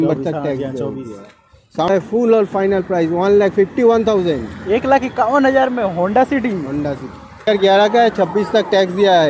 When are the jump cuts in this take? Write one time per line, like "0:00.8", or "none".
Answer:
0:01.9
0:07.5